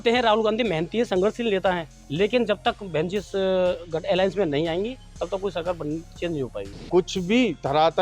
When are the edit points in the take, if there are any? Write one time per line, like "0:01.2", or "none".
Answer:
0:06.7

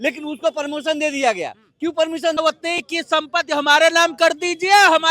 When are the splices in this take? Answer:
0:02.4

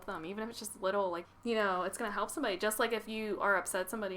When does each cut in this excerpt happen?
0:01.3

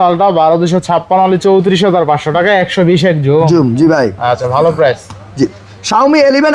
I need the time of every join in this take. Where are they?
none

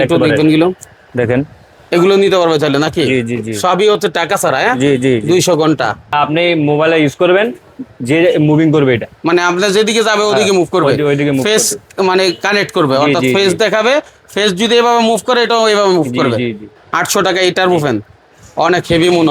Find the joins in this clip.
0:06.1
0:16.7

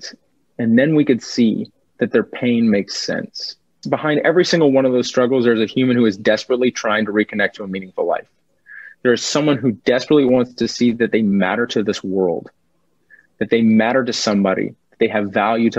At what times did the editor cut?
0:03.8

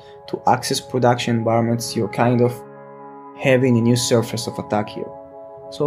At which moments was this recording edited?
0:03.3

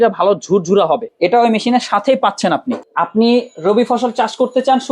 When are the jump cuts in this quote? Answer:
0:01.1
0:02.9

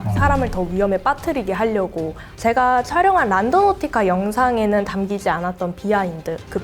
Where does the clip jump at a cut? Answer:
0:02.2

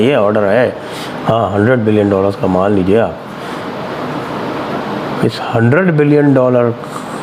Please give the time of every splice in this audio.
none

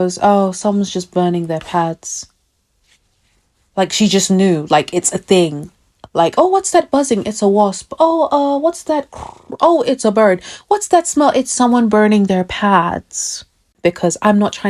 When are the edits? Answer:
0:13.7

